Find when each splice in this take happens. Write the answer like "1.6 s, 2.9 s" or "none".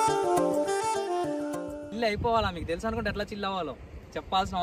none